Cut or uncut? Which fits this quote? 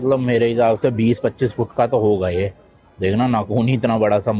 uncut